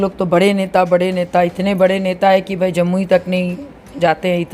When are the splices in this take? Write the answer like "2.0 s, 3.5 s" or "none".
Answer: none